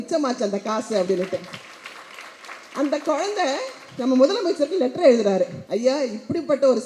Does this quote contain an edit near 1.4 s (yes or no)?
no